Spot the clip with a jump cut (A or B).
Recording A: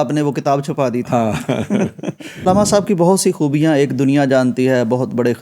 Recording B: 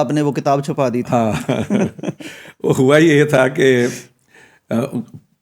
A